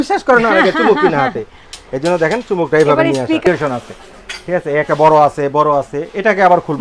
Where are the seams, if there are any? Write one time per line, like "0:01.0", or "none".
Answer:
0:03.5